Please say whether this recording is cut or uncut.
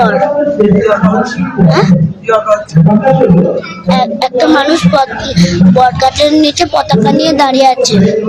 uncut